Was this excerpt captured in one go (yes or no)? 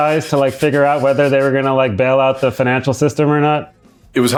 yes